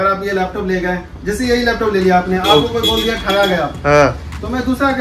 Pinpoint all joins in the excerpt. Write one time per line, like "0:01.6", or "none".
none